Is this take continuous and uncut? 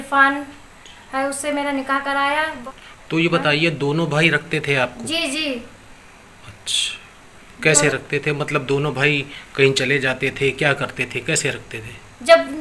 no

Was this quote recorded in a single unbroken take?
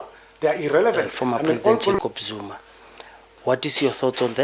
no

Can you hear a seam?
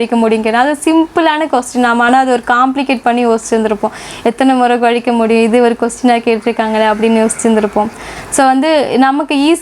no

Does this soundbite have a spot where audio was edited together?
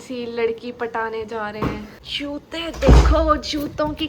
yes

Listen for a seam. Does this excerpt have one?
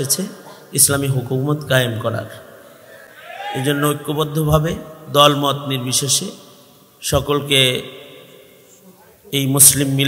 no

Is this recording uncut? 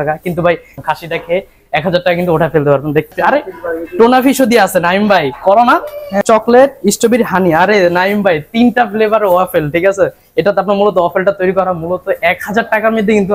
no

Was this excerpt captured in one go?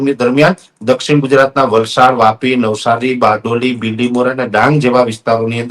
yes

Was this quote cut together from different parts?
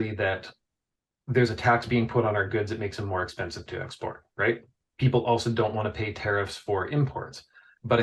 yes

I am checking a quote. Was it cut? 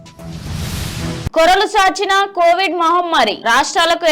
yes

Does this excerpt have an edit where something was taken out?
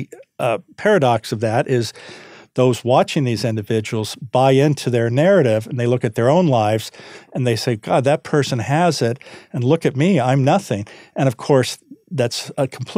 no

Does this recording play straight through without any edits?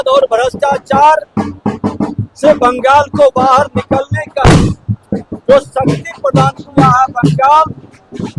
yes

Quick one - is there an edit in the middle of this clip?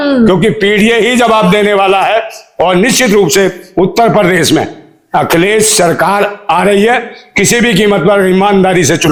no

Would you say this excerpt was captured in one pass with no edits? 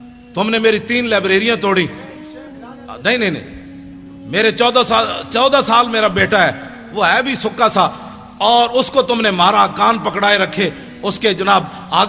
yes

